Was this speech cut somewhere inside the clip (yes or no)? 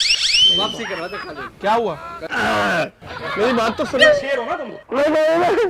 yes